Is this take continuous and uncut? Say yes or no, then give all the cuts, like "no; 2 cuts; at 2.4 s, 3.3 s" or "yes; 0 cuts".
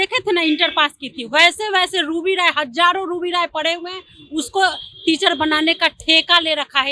yes; 0 cuts